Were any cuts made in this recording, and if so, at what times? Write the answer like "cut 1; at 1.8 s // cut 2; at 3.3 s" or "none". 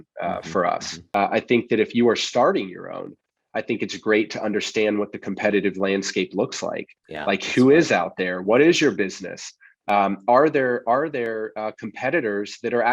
cut 1; at 1.0 s

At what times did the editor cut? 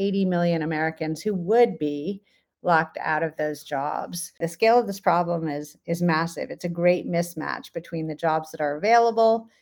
cut 1; at 4.5 s

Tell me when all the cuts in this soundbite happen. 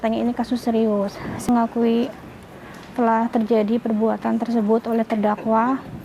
cut 1; at 1.5 s

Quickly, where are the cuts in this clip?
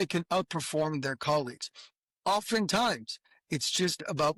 none

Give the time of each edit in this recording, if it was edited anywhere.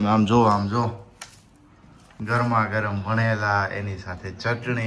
none

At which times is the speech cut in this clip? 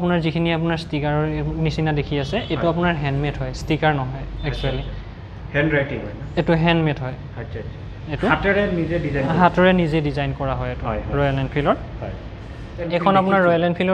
cut 1; at 12.9 s

